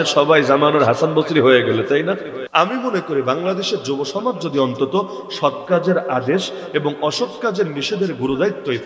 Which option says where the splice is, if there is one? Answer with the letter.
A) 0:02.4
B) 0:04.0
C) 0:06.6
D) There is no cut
A